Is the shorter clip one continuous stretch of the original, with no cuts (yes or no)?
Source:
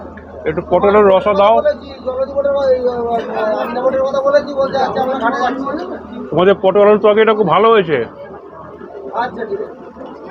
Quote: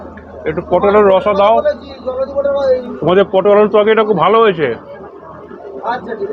no